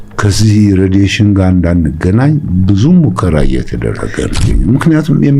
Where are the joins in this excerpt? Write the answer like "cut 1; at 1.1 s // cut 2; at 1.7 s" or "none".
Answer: cut 1; at 4.4 s